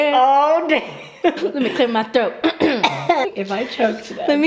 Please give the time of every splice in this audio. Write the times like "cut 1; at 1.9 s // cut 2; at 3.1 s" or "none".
cut 1; at 1.4 s // cut 2; at 3.3 s

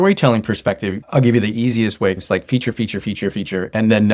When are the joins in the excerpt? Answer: cut 1; at 0.9 s // cut 2; at 2.2 s

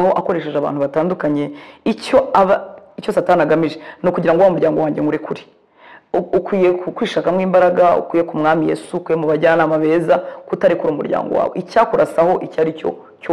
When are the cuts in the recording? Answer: none

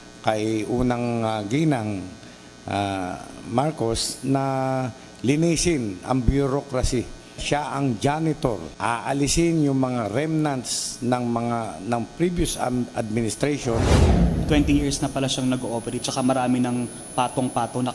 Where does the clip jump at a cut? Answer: cut 1; at 7.4 s // cut 2; at 8.7 s // cut 3; at 14.2 s

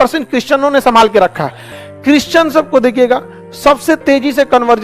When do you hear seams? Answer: cut 1; at 1.8 s

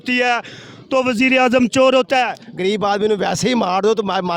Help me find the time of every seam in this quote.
cut 1; at 2.3 s

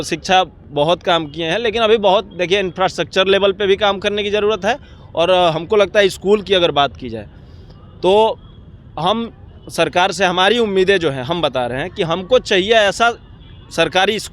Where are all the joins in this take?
none

